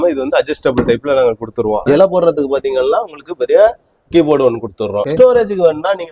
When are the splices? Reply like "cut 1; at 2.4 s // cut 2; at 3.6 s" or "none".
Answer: cut 1; at 1.8 s // cut 2; at 5.0 s